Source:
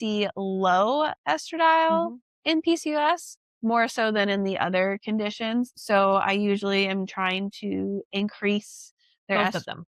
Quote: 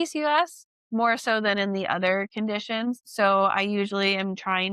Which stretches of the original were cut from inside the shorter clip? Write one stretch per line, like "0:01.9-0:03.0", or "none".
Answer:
none